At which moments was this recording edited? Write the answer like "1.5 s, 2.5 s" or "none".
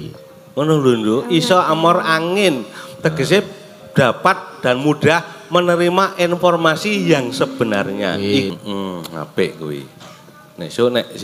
8.5 s